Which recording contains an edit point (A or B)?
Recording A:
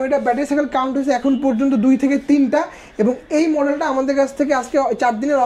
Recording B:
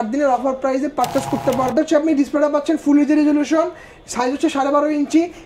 B